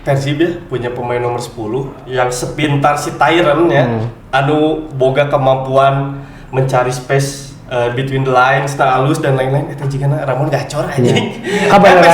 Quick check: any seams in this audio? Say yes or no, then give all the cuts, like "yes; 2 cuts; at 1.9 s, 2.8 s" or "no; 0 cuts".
no; 0 cuts